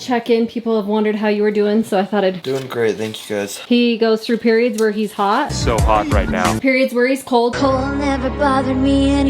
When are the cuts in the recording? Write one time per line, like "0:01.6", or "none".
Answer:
0:03.6
0:06.6